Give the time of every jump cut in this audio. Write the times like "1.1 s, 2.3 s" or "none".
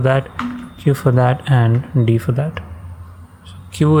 none